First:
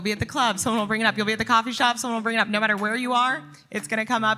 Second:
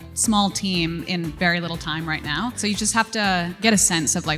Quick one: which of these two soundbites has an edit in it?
second; 2 cuts; at 2.6 s, 3.6 s

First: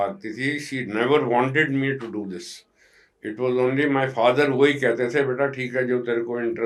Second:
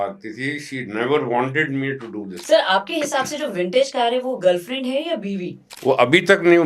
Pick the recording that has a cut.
second; 2 cuts; at 2.4 s, 5.7 s

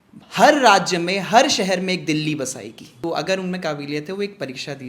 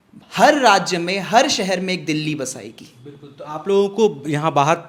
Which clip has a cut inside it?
first; 1 cut; at 2.8 s

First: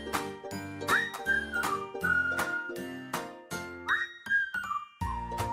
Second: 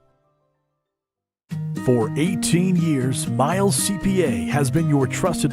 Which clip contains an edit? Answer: second; 1 cut; at 1.5 s

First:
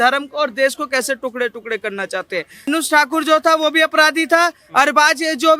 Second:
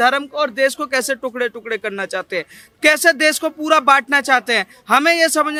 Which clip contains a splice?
first; 1 cut; at 2.7 s

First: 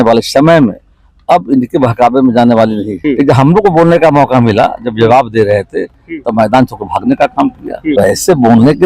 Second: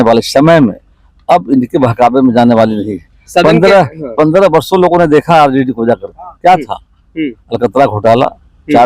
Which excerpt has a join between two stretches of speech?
first; 2 cuts; at 2.9 s, 7.9 s

